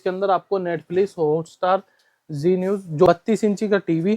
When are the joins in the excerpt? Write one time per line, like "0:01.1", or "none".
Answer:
0:03.1